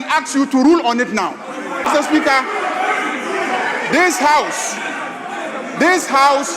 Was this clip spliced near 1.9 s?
yes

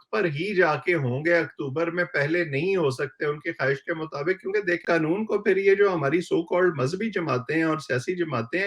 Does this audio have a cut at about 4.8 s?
yes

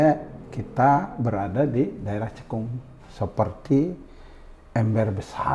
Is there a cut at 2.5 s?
no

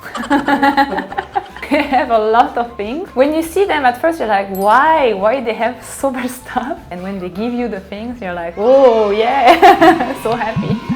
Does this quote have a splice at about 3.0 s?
yes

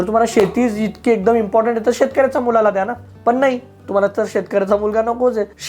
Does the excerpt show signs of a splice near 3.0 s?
no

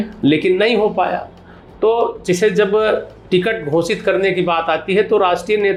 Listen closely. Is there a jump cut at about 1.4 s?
no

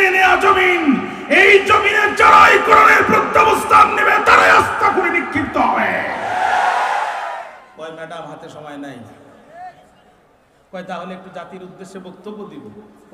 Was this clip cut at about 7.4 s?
yes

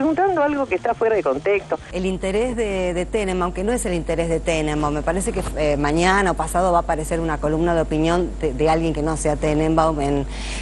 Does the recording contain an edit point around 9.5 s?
no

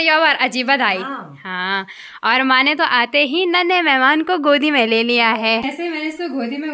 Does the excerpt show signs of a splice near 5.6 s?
yes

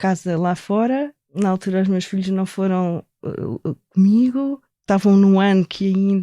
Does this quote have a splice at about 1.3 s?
yes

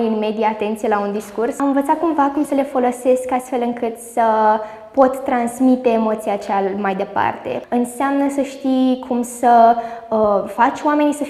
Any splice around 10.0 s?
no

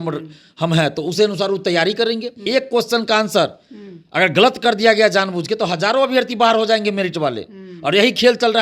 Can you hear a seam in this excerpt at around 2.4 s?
yes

